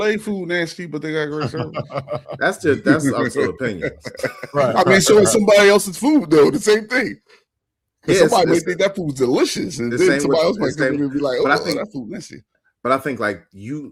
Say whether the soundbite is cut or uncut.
uncut